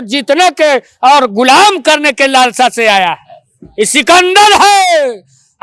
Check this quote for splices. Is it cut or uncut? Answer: uncut